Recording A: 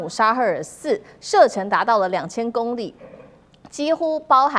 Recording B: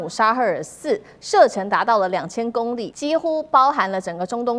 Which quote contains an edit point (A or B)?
B